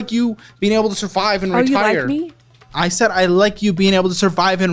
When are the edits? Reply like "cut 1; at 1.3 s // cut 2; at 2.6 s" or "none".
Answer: none